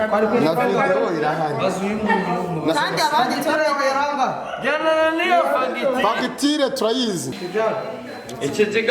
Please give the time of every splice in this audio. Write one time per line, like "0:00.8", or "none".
0:07.3